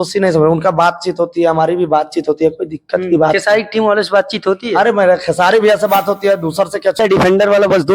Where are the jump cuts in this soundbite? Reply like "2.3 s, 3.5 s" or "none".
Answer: 7.0 s